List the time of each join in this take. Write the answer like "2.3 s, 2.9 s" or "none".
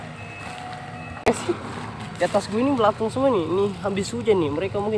1.3 s

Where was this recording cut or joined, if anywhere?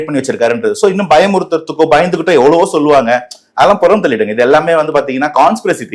none

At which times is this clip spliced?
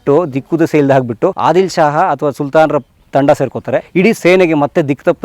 1.4 s, 3.9 s

